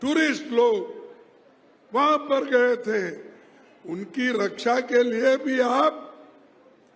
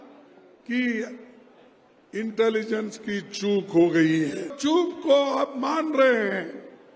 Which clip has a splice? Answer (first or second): second